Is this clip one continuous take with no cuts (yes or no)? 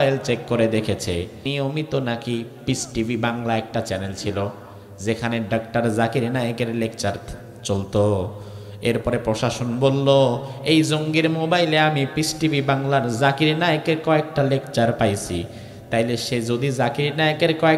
no